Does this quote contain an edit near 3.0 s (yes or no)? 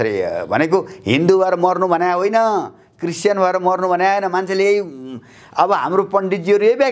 no